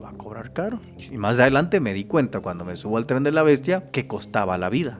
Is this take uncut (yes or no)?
no